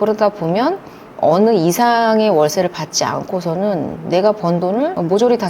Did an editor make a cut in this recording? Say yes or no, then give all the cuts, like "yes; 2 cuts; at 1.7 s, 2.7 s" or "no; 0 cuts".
yes; 1 cut; at 1.0 s